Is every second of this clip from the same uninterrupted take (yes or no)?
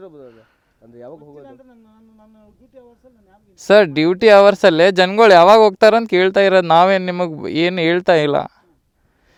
yes